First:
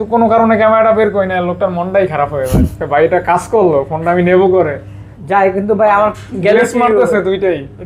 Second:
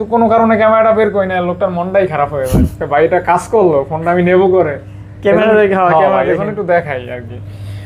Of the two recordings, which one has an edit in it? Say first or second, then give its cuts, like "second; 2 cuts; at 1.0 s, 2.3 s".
first; 1 cut; at 5.0 s